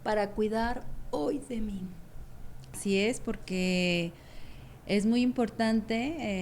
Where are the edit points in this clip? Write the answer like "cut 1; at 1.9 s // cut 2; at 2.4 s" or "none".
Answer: cut 1; at 2.8 s